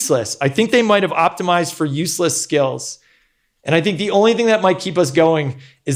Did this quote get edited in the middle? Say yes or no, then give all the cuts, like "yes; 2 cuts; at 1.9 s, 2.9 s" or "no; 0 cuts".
no; 0 cuts